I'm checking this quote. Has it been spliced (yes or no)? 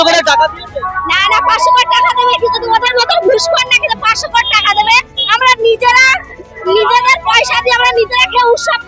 no